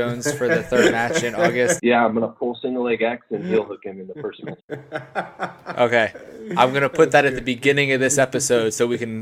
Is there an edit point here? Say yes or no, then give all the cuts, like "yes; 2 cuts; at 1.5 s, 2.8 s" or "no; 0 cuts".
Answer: yes; 2 cuts; at 1.8 s, 4.6 s